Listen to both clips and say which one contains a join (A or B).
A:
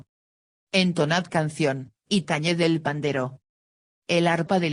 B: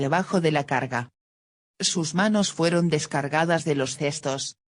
B